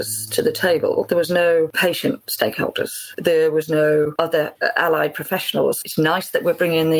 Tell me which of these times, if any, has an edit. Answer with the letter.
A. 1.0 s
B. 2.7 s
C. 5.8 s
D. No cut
C